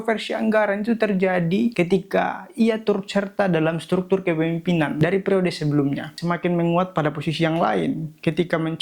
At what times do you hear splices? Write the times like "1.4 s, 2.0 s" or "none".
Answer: 4.9 s, 6.1 s

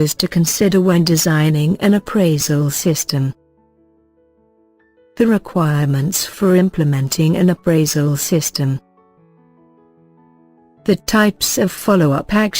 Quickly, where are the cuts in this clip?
3.4 s, 5.0 s, 8.8 s, 10.8 s

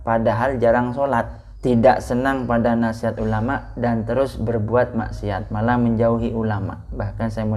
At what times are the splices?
1.4 s

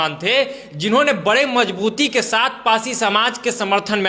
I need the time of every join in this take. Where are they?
none

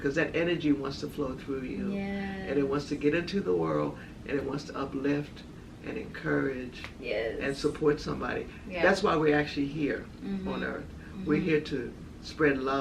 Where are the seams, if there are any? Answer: none

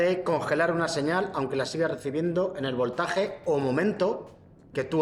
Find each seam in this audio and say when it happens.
none

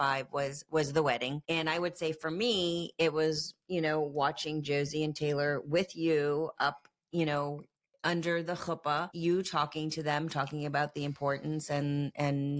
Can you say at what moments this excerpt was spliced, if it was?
1.4 s, 9.1 s

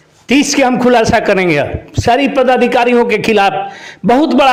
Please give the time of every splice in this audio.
none

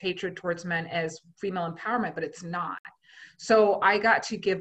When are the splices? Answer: none

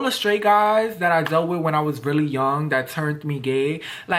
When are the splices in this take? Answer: none

